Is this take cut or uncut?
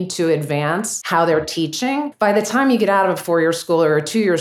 cut